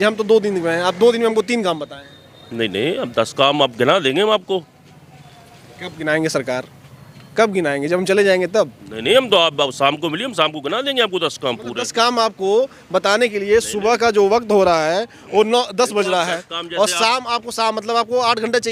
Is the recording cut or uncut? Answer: uncut